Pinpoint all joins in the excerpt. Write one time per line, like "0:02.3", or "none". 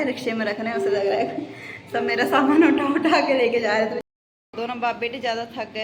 0:04.0